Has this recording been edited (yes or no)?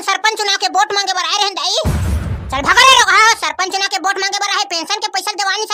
no